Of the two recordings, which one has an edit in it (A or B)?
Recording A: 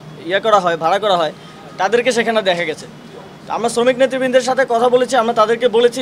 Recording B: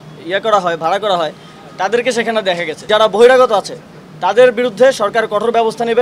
B